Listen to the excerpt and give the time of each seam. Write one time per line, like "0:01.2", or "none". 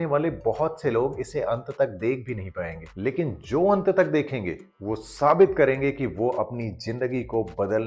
none